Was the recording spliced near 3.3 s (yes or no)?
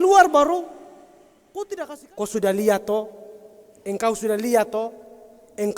no